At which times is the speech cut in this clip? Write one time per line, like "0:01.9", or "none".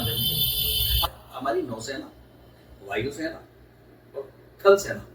0:00.9

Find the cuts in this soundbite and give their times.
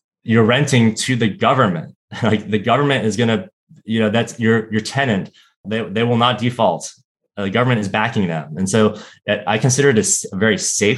none

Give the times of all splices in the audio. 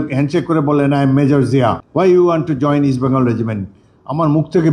0:01.8

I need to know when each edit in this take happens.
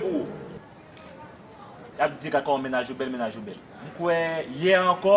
none

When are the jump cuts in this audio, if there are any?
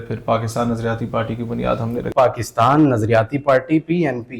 0:02.0

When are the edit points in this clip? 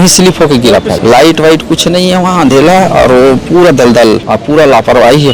0:01.0
0:04.3

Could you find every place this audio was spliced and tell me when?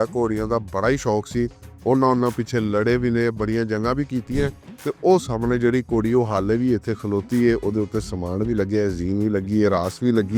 none

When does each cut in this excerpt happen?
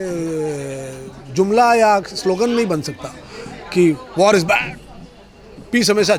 none

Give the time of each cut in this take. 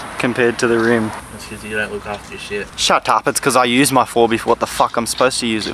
0:01.2
0:02.7

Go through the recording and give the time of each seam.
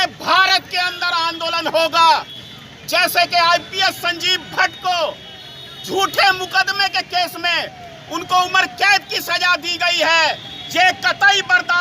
0:02.4

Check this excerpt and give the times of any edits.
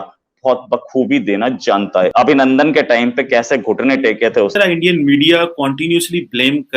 0:02.1
0:04.5

